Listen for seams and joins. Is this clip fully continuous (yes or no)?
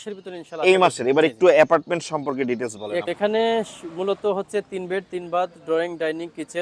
no